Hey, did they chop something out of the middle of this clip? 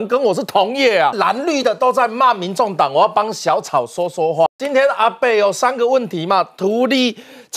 yes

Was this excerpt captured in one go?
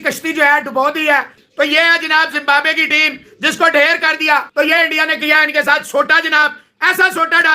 no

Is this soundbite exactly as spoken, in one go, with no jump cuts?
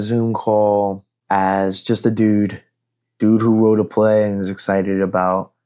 no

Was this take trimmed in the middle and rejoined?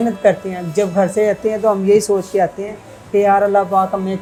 no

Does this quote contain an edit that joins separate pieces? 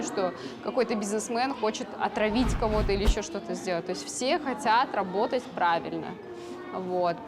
no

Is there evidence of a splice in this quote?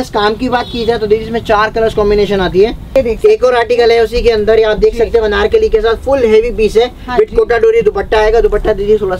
yes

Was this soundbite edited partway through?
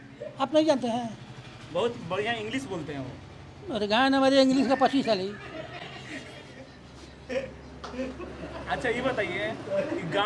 no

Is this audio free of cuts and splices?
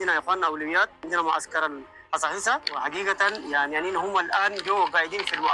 yes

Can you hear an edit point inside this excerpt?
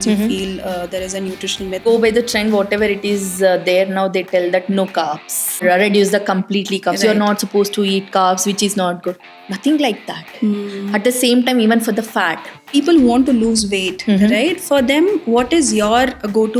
yes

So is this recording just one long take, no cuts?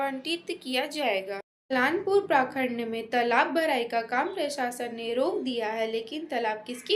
no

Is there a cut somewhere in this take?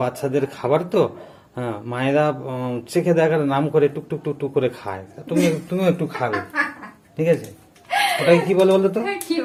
no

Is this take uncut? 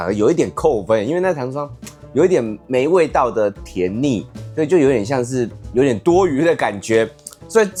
yes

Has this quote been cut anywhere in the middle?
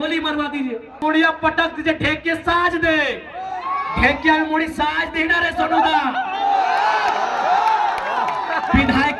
yes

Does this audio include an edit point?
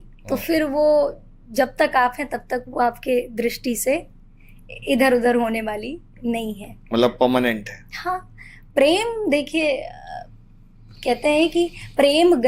no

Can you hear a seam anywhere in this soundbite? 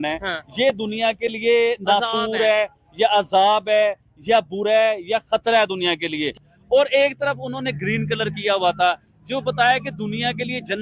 yes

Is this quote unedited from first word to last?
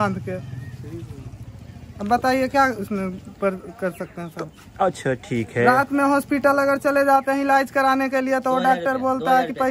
yes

